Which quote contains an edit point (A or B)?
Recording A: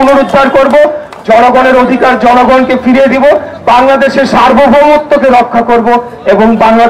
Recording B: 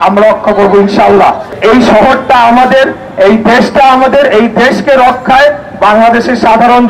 B